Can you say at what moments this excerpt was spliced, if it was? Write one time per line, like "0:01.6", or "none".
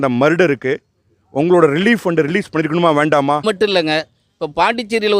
0:03.4